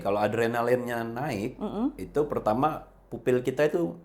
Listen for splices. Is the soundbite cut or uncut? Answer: uncut